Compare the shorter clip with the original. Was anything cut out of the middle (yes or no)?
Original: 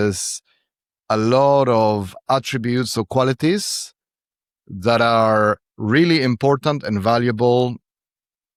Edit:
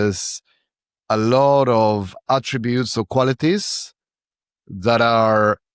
no